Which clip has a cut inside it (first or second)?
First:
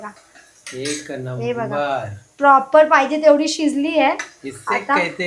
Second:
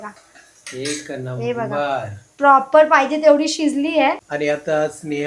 second